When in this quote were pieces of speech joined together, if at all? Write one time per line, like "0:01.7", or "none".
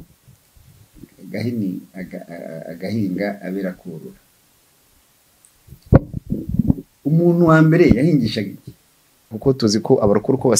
0:09.4